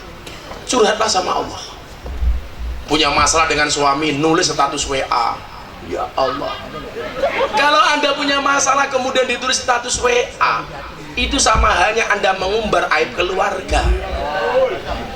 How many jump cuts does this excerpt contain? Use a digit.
1